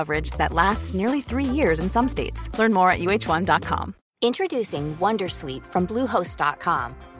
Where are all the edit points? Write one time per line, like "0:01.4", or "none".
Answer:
0:04.0